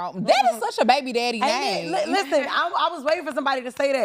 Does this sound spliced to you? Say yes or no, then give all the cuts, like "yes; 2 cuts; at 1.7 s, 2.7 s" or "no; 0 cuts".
no; 0 cuts